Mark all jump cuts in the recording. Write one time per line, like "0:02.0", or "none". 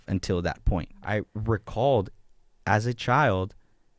0:01.0